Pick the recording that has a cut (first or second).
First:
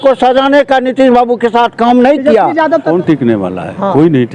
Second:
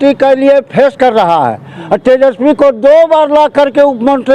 first